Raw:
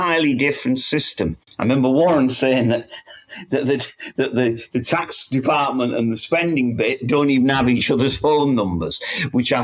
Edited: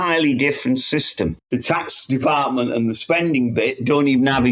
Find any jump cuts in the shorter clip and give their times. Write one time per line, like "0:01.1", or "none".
0:01.4